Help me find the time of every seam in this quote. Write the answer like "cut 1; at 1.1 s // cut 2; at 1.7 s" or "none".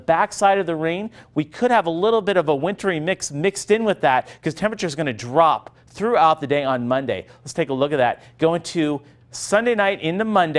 none